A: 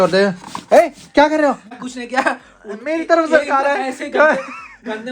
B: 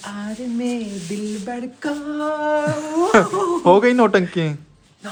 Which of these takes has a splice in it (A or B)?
A